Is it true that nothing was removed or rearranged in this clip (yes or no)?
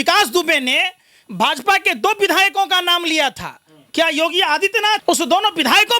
no